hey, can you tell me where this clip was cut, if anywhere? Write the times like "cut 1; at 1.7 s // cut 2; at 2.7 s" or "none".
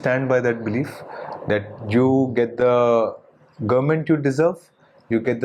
none